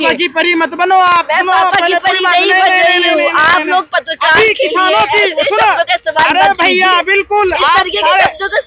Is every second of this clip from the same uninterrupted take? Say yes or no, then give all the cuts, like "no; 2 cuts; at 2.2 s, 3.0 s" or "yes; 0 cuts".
yes; 0 cuts